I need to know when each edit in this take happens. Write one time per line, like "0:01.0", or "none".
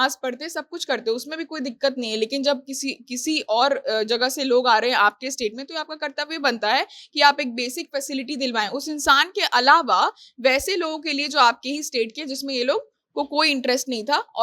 none

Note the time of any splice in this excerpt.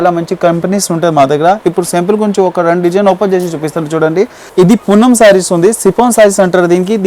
0:04.4

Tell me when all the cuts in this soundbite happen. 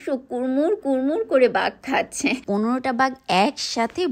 0:02.4

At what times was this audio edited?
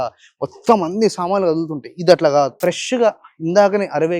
0:02.5

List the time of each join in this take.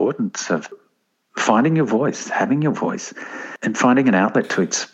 none

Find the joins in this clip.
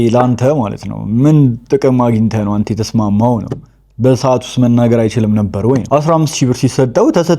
none

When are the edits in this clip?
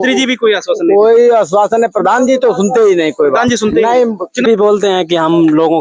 0:04.5

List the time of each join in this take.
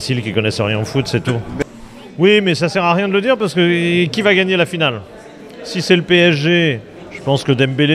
0:01.6

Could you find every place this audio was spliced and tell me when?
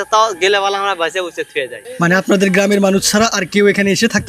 0:01.8

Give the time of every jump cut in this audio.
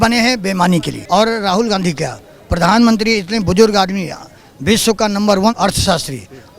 0:01.0
0:05.5

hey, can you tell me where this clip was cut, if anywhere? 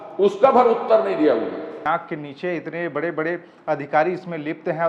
0:01.8

